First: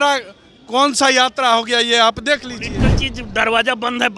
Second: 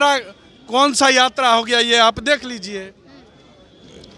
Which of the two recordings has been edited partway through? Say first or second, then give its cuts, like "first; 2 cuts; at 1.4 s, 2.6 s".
first; 1 cut; at 2.8 s